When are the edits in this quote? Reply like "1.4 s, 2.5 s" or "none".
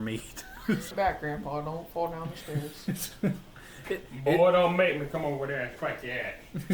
0.9 s